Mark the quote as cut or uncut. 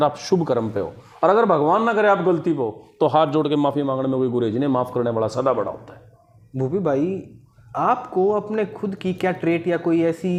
uncut